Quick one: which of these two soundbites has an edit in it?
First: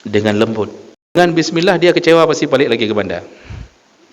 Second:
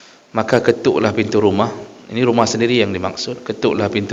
first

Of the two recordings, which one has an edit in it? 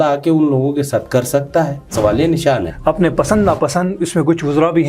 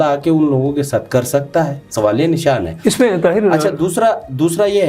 first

